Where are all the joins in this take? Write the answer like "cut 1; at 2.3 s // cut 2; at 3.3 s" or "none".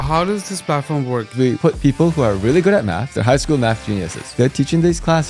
cut 1; at 1.3 s // cut 2; at 3.1 s // cut 3; at 4.2 s